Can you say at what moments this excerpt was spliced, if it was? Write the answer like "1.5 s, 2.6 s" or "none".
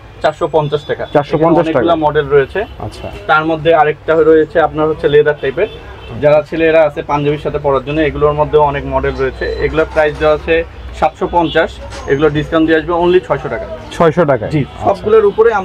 none